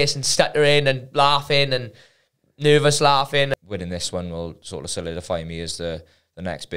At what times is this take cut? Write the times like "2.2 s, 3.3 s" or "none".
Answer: 3.5 s

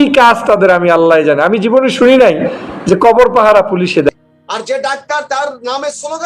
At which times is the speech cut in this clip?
4.1 s

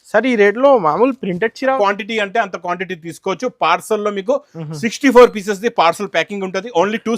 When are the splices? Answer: 1.8 s

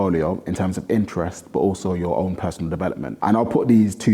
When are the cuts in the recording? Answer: 3.1 s

